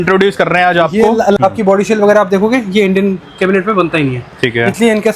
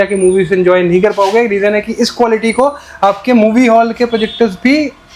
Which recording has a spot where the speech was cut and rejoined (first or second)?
first